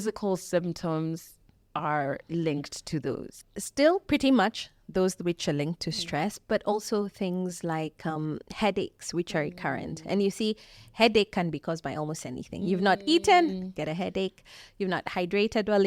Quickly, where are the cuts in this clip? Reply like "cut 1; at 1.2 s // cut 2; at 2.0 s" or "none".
none